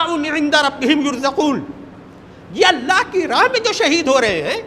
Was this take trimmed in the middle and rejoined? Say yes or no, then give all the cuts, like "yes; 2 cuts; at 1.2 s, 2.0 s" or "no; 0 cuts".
no; 0 cuts